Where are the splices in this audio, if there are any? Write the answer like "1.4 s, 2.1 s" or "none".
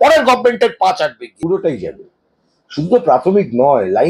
1.3 s